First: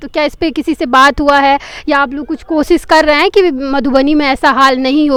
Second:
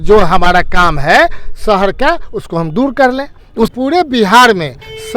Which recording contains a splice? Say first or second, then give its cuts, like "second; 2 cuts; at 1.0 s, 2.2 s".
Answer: second; 1 cut; at 3.7 s